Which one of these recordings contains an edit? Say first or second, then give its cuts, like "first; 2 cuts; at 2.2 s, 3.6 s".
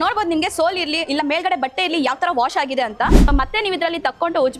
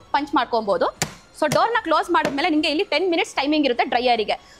first; 1 cut; at 3.3 s